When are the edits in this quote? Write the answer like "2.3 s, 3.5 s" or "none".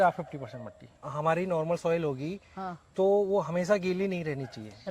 1.1 s